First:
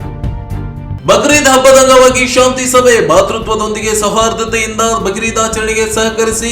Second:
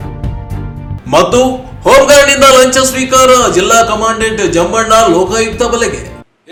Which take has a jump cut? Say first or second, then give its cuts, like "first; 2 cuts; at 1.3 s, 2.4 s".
first; 1 cut; at 1.0 s